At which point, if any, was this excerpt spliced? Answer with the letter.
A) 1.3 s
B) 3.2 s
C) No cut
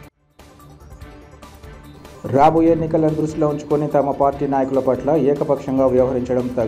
A